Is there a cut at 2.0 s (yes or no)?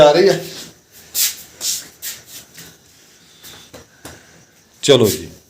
yes